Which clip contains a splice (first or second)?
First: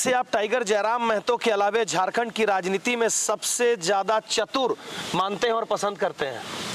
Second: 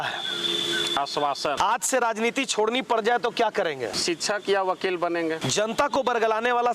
second